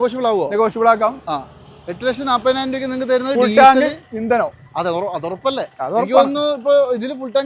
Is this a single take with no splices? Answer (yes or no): yes